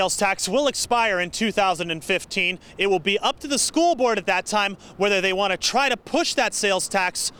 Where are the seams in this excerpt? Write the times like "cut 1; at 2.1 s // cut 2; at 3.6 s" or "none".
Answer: none